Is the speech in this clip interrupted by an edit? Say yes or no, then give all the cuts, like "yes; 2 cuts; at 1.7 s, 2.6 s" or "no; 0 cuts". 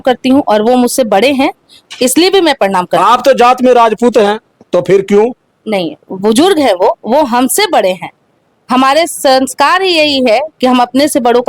no; 0 cuts